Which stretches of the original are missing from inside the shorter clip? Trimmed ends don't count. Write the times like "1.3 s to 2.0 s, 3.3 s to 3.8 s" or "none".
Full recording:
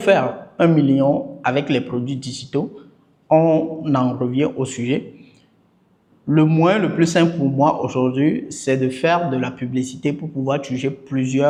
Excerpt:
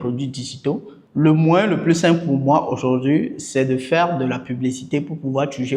2.8 s to 6.1 s